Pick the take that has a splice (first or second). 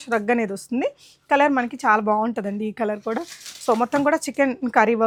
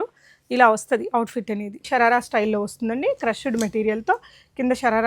second